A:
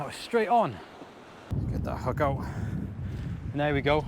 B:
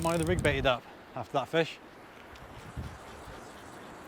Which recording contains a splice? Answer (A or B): A